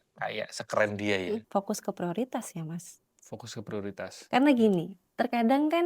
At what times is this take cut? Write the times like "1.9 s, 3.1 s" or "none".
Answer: 1.5 s